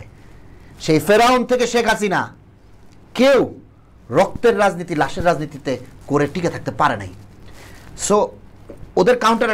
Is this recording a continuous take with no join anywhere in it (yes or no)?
yes